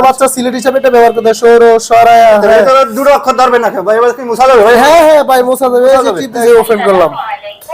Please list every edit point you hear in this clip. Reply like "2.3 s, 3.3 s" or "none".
6.4 s